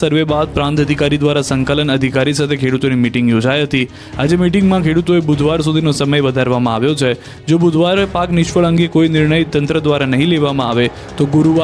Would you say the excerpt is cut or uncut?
uncut